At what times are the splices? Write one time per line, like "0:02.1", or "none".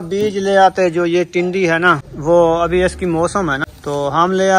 0:02.1
0:03.7